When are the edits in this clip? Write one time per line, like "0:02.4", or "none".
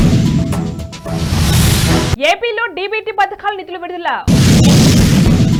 none